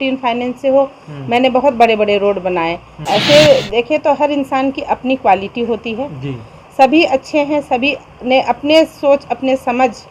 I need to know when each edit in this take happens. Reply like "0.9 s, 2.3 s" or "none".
2.9 s